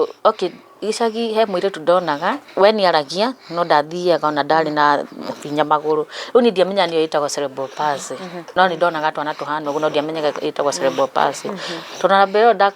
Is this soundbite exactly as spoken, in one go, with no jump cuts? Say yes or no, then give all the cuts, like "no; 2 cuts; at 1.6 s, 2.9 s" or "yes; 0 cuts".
no; 2 cuts; at 2.4 s, 8.6 s